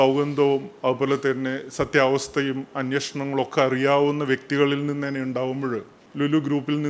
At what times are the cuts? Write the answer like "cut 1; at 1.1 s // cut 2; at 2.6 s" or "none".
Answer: cut 1; at 6.0 s